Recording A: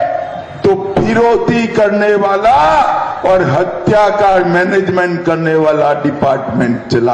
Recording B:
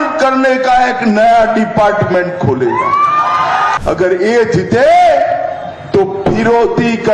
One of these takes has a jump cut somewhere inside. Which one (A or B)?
B